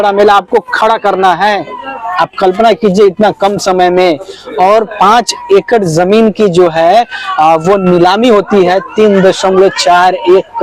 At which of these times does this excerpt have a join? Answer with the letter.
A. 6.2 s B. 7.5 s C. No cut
C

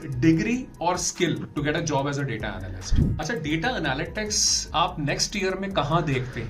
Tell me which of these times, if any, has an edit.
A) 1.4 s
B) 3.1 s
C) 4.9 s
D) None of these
B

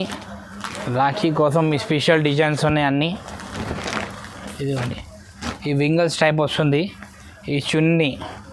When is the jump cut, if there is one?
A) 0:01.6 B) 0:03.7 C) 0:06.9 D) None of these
D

